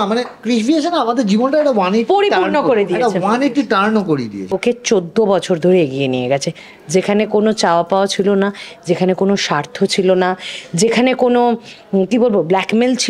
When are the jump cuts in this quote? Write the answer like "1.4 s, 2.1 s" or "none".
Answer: 4.5 s